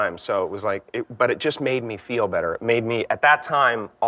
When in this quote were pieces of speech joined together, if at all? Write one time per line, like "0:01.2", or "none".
none